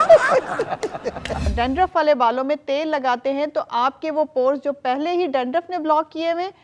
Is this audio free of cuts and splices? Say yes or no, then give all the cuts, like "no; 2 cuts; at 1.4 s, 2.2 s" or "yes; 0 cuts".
no; 1 cut; at 1.5 s